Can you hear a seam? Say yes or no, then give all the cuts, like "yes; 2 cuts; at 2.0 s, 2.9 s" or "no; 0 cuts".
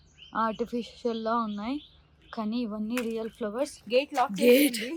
yes; 1 cut; at 3.8 s